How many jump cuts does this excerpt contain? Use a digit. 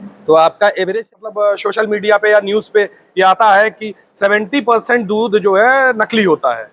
1